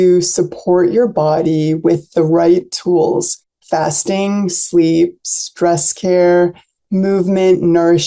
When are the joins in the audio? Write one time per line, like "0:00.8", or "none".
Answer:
0:06.7